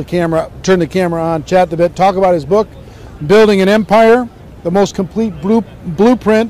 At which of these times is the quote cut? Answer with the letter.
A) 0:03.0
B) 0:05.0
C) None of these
B